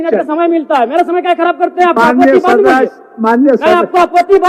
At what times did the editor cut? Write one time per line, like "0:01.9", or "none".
0:01.9